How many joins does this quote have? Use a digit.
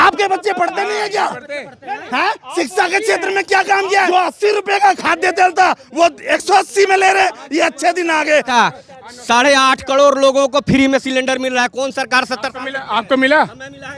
2